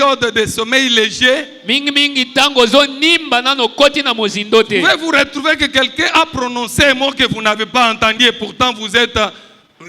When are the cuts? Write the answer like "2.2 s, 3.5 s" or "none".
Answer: none